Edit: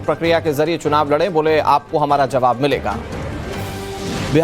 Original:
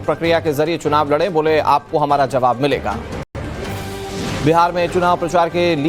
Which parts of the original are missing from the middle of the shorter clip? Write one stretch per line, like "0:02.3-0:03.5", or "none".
0:03.2-0:03.4